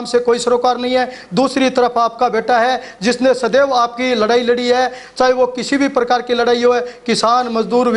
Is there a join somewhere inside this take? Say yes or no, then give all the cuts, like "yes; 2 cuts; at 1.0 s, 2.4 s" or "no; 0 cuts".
no; 0 cuts